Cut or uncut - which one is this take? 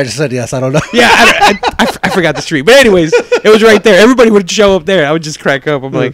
uncut